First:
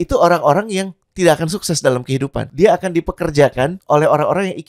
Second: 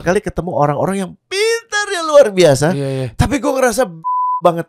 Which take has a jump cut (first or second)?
first